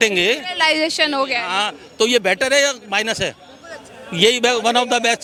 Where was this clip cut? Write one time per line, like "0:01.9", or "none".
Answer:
none